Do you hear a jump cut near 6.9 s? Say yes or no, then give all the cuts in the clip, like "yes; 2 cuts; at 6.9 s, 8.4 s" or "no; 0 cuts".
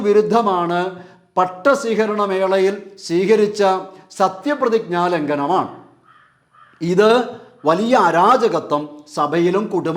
no; 0 cuts